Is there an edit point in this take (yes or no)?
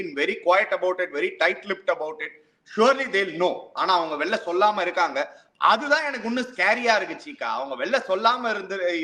no